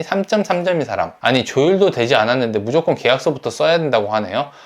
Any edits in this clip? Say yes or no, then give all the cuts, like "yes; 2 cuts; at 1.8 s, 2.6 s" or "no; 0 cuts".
yes; 1 cut; at 1.2 s